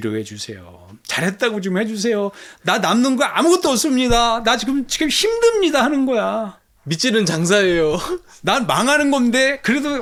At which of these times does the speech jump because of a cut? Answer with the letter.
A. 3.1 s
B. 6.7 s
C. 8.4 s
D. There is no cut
D